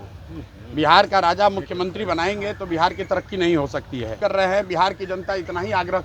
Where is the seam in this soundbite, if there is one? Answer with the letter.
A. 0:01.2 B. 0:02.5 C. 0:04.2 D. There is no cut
C